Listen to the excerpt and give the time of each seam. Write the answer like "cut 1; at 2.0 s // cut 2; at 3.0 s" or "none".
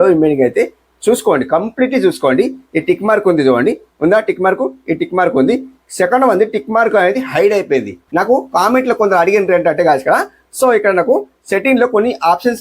cut 1; at 8.0 s